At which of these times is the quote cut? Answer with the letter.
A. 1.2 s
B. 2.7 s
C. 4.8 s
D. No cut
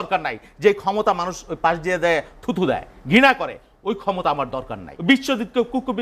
C